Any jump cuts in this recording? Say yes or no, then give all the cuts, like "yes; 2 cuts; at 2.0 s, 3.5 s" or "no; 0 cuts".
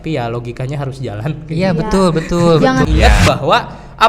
yes; 1 cut; at 2.8 s